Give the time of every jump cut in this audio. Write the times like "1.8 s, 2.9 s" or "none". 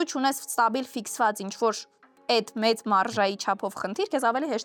none